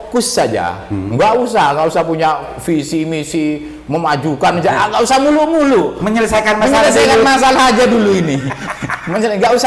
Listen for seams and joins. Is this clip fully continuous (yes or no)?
yes